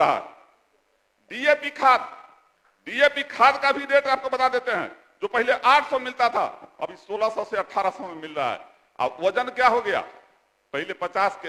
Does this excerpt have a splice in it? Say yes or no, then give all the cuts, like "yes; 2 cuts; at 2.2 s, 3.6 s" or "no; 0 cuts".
no; 0 cuts